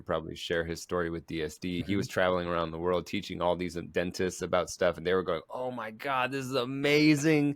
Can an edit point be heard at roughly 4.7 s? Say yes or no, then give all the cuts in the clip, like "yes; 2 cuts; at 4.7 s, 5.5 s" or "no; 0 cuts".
no; 1 cut; at 1.8 s